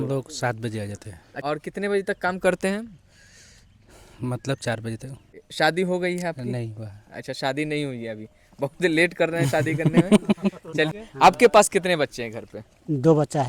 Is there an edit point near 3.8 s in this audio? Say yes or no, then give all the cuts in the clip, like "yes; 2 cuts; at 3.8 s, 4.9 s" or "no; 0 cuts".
no; 3 cuts; at 1.2 s, 5.4 s, 11.0 s